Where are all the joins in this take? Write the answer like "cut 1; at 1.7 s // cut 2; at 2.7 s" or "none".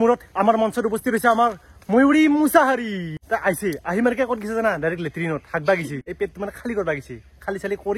cut 1; at 3.2 s // cut 2; at 6.0 s